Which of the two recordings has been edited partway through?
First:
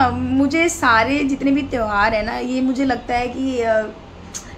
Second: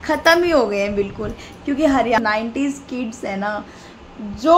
second; 1 cut; at 2.2 s

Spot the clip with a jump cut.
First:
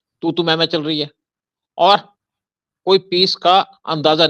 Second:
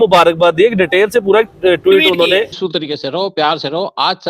second; 1 cut; at 2.6 s

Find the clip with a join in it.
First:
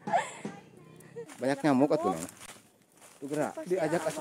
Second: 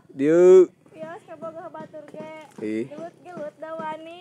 first; 1 cut; at 1.2 s

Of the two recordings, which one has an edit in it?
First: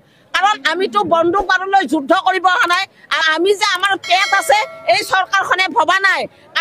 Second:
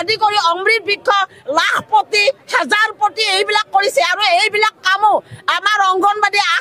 first; 1 cut; at 3.2 s

